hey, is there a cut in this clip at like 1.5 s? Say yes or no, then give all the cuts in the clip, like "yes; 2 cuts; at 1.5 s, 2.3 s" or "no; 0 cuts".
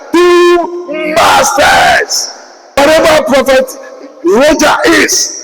no; 1 cut; at 2.8 s